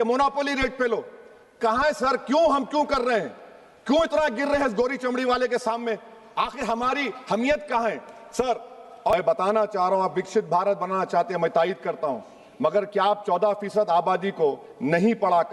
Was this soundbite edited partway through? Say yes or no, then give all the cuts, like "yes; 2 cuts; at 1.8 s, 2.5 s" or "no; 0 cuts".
yes; 1 cut; at 9.1 s